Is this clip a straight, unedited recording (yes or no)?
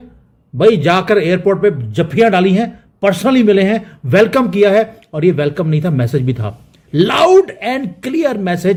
yes